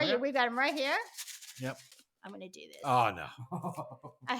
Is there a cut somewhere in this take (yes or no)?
yes